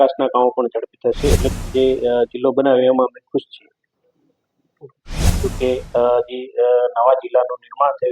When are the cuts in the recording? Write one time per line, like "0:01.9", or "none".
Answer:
0:01.5
0:05.4